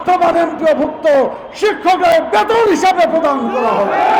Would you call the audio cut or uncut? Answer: uncut